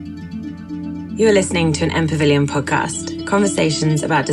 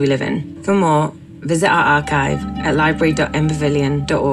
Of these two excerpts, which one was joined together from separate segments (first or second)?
first